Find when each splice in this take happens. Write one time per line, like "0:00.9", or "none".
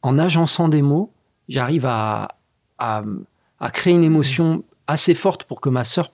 none